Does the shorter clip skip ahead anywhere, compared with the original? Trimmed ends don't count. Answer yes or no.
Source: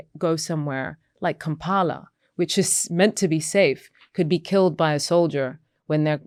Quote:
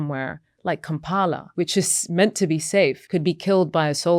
yes